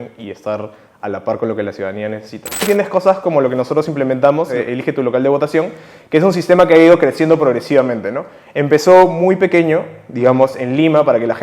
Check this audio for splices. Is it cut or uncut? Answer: cut